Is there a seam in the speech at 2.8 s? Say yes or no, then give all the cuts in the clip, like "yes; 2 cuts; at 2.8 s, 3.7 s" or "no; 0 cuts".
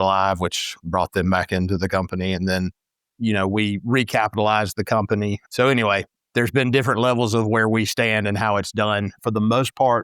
no; 3 cuts; at 5.4 s, 6.1 s, 9.2 s